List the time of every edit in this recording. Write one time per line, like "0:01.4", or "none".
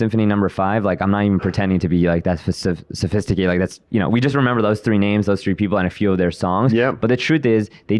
none